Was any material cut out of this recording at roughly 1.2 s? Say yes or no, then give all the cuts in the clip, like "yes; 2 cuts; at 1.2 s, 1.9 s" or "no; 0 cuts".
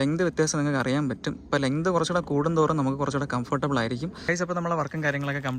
no; 1 cut; at 4.2 s